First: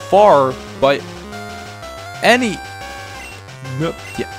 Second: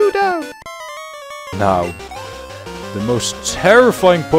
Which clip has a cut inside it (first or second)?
second